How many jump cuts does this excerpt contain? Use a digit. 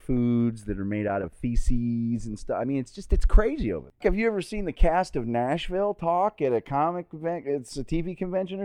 1